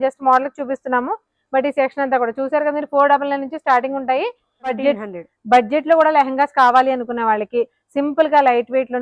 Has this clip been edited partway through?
yes; 1 cut; at 4.8 s

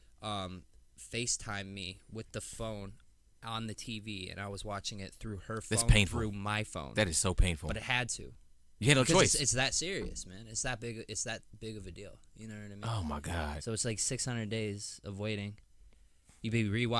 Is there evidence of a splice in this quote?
no; 0 cuts

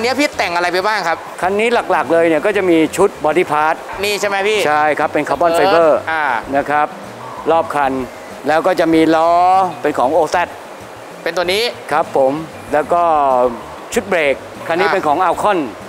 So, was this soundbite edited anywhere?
no; 0 cuts

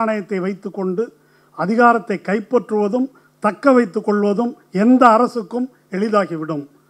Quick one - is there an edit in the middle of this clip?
no; 0 cuts

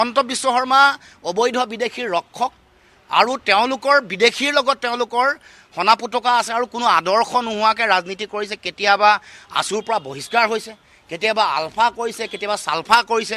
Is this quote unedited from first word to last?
yes; 0 cuts

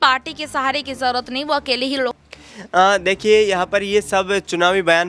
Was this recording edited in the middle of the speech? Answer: yes; 1 cut; at 2.2 s

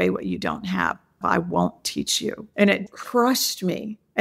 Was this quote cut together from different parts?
yes; 2 cuts; at 1.1 s, 2.7 s

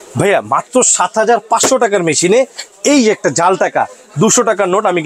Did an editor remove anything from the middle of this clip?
no; 0 cuts

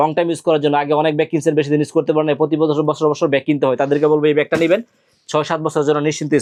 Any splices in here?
no; 0 cuts

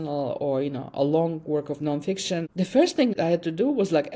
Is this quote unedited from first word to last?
no; 2 cuts; at 2.5 s, 3.1 s

